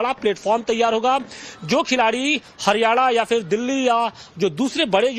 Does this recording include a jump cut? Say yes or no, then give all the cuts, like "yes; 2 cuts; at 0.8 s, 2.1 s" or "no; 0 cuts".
no; 0 cuts